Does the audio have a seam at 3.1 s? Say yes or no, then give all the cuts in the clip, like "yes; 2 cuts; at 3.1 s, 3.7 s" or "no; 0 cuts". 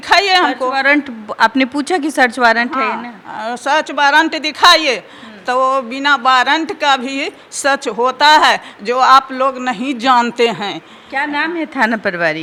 no; 0 cuts